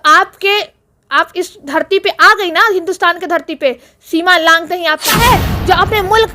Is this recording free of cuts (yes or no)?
no